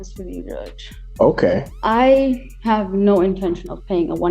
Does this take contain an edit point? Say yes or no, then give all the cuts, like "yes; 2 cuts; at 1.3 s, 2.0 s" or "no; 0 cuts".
yes; 1 cut; at 1.7 s